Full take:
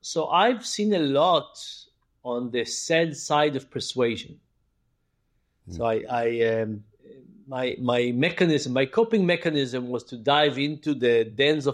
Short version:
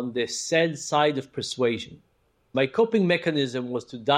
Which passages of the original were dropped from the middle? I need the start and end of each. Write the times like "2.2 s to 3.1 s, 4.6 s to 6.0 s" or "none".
4.9 s to 8.7 s